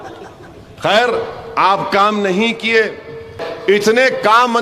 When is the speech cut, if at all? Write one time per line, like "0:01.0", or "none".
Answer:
0:03.5